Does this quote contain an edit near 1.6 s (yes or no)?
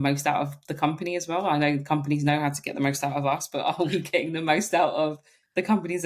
no